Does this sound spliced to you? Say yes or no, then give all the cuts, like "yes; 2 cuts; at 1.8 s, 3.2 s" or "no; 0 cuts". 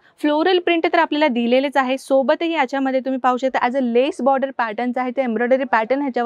no; 0 cuts